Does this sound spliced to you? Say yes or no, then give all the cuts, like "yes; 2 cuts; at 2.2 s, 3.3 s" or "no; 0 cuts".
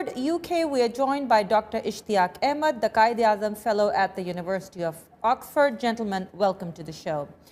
yes; 1 cut; at 6.3 s